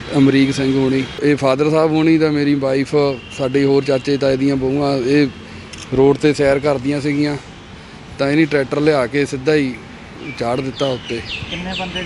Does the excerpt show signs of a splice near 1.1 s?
yes; 1 cut; at 1.1 s

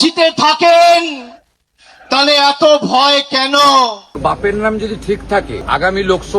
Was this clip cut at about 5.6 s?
yes; 2 cuts; at 4.0 s, 5.6 s

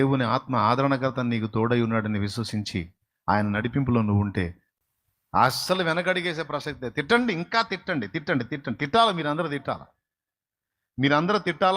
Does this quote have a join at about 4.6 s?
yes; 1 cut; at 4.6 s

